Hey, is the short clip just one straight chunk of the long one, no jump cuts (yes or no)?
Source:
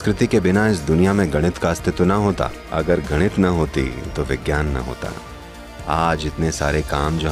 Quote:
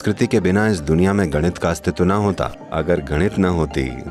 yes